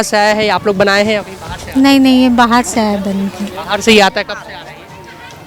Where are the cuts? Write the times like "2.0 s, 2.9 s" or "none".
none